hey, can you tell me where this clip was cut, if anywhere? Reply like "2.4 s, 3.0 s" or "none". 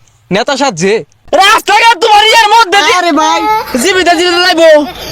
1.1 s